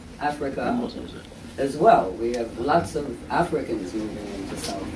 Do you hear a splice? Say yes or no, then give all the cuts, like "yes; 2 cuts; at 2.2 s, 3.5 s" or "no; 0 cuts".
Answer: yes; 1 cut; at 1.0 s